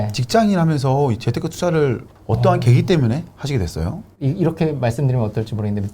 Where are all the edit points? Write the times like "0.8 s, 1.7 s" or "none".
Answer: 4.0 s